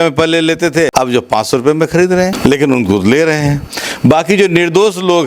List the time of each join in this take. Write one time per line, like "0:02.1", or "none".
0:00.9
0:02.4